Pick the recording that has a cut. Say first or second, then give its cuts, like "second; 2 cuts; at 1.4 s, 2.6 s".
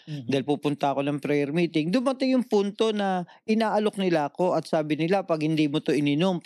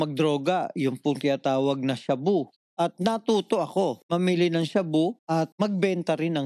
second; 3 cuts; at 2.6 s, 4.0 s, 5.4 s